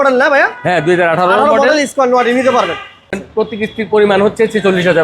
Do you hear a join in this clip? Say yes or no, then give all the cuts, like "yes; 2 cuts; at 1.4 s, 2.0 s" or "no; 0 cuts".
yes; 1 cut; at 3.1 s